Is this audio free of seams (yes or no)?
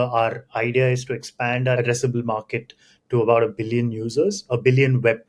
no